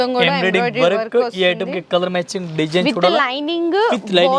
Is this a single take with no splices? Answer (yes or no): yes